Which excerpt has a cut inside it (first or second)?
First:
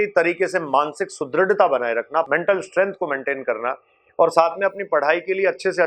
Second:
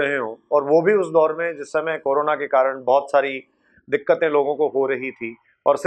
first